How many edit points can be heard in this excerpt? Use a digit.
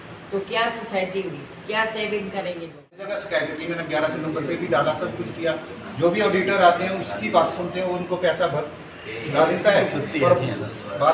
1